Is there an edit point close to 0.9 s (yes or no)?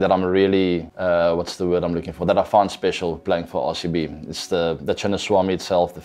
yes